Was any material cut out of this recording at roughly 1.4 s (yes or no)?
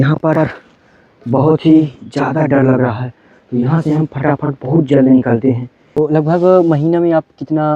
no